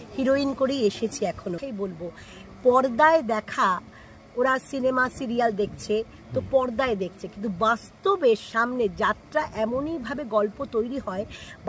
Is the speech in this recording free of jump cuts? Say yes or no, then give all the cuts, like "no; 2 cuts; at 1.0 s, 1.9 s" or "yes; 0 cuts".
no; 1 cut; at 1.6 s